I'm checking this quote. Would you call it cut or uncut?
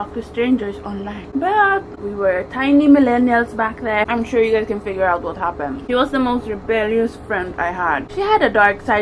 cut